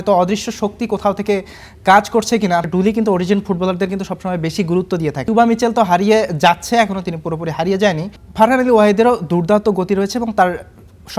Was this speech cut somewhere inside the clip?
yes; 3 cuts; at 2.7 s, 5.2 s, 8.2 s

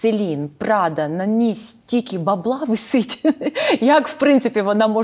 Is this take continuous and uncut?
yes; 0 cuts

